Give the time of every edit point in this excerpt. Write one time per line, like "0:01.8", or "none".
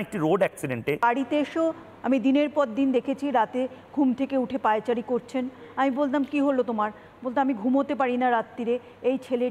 0:01.0